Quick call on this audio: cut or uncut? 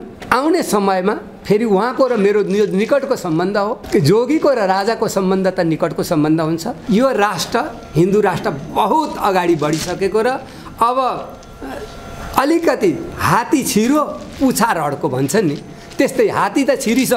cut